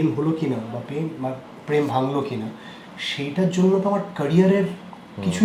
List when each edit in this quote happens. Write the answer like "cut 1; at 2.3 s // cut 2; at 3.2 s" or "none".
none